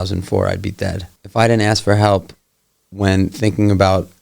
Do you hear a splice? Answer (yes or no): yes